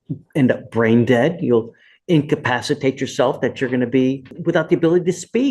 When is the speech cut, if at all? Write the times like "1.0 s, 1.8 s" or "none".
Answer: 4.3 s